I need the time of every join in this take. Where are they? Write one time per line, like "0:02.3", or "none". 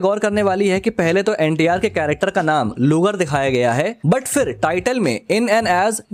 none